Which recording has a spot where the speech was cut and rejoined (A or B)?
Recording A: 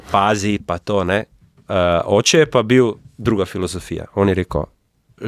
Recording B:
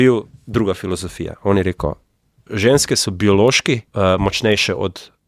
B